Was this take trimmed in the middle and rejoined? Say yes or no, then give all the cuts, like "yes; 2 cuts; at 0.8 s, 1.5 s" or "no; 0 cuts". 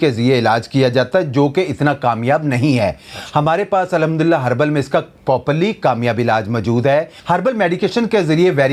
no; 0 cuts